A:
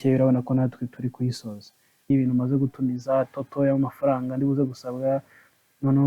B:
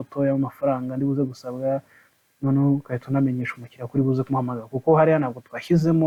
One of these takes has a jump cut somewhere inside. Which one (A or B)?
A